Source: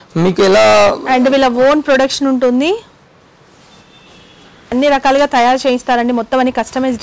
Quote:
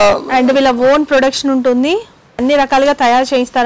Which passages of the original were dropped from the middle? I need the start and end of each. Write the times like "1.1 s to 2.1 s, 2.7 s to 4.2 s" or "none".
3.0 s to 4.5 s

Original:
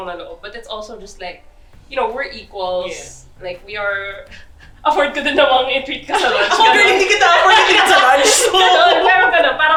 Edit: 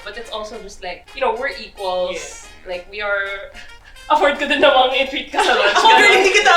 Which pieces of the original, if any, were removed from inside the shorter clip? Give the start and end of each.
1.4 s to 1.8 s

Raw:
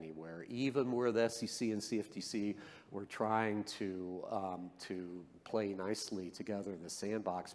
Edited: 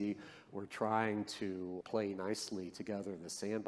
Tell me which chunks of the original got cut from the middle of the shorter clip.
4.2 s to 5.4 s

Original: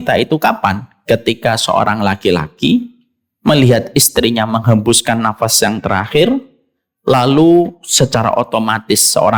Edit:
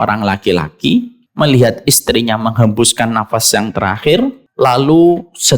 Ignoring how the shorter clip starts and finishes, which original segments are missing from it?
3.0 s to 3.3 s, 6.5 s to 6.9 s

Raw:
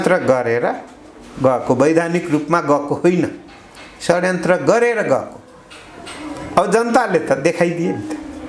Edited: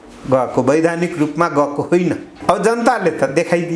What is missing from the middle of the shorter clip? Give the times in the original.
3.4 s to 6.4 s

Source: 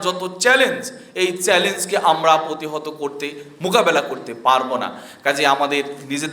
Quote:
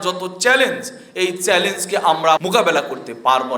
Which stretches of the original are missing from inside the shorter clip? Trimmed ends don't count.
2.4 s to 3.6 s

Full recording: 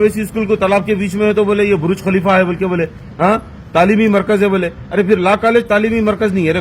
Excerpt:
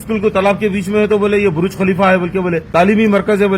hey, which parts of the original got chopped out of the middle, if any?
2.9 s to 3.6 s

